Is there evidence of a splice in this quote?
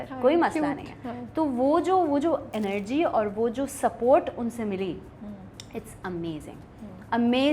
no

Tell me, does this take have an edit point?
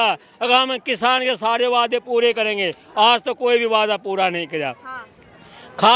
no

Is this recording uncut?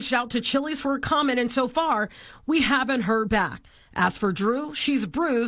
yes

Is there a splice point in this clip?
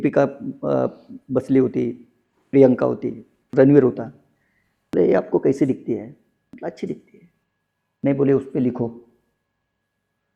no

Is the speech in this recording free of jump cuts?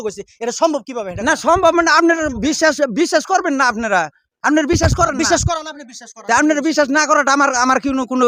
yes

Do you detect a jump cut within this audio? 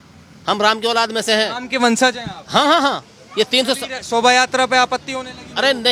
no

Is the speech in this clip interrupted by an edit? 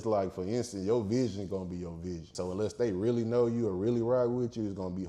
yes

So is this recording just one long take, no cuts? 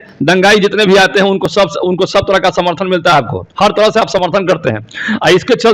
yes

